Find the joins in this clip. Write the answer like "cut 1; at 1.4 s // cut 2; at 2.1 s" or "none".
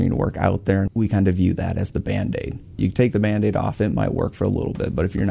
cut 1; at 0.9 s // cut 2; at 2.9 s